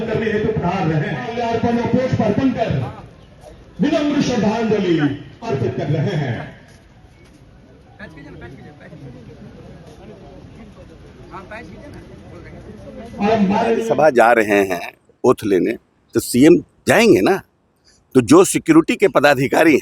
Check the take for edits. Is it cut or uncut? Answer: cut